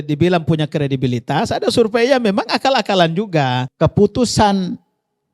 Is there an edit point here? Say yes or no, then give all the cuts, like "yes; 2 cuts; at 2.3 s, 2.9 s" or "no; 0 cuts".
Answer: yes; 1 cut; at 3.7 s